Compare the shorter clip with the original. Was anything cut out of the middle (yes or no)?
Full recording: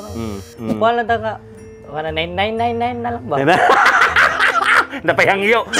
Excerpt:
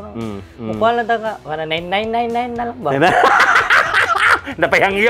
yes